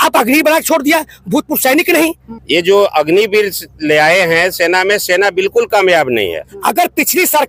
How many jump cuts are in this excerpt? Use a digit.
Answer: 2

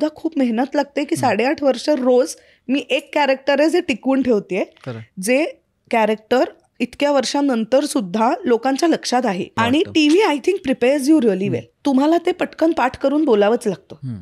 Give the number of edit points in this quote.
2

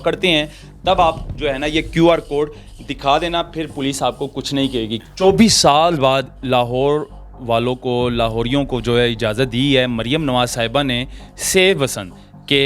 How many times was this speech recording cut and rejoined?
1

